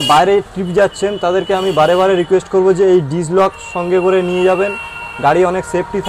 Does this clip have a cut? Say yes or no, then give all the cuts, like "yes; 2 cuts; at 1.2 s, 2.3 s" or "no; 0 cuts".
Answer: no; 0 cuts